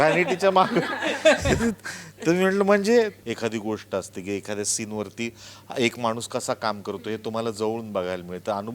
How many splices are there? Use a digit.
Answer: 1